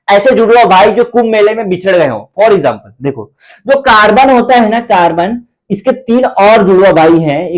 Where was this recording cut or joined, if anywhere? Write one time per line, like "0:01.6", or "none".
none

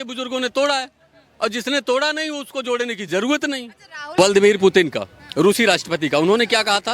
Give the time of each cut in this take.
0:04.2

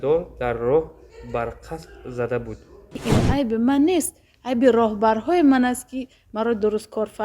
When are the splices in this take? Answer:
0:02.9

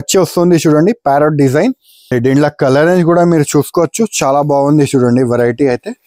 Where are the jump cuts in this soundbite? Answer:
0:02.1

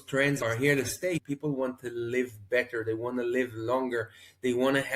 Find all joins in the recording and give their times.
0:01.2

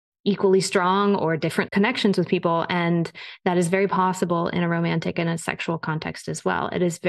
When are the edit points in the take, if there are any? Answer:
0:01.7

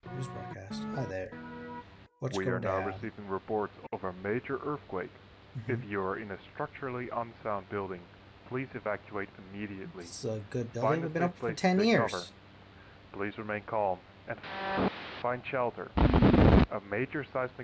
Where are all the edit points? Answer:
none

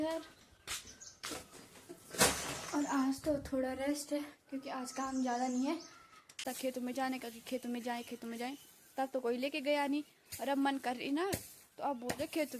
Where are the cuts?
0:01.3
0:06.5

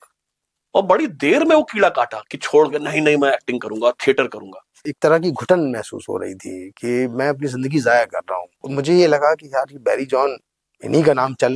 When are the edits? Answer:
0:04.9
0:08.6

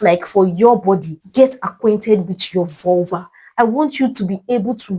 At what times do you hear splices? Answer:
0:01.2

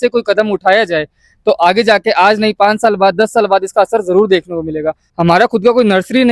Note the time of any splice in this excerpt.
0:05.1

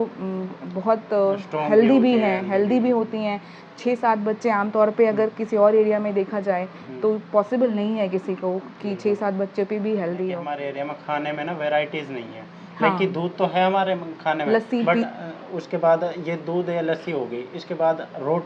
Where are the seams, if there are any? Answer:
0:10.5

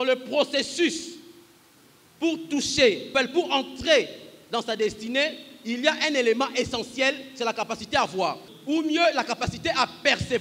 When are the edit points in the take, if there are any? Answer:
0:03.1
0:08.5

